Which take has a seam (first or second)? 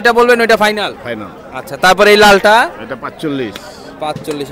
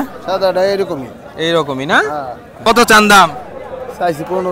second